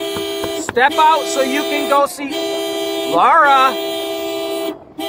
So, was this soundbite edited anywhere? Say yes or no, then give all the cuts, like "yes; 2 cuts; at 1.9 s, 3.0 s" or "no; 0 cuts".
no; 0 cuts